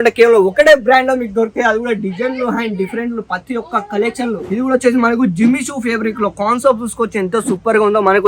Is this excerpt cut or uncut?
cut